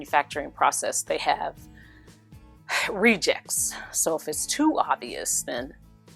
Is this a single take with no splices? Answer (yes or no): yes